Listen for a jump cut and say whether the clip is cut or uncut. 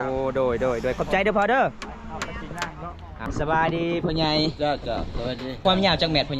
cut